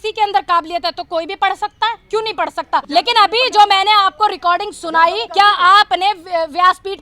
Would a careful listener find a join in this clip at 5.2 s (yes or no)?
yes